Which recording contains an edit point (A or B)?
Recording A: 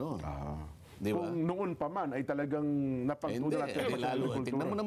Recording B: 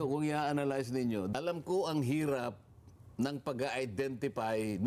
B